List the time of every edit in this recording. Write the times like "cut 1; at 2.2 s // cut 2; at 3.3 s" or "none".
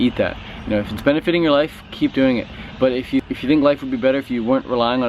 cut 1; at 3.3 s